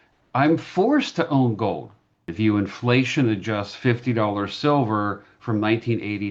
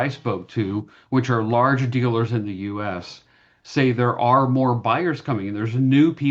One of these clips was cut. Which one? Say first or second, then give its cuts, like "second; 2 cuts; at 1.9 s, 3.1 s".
first; 1 cut; at 2.2 s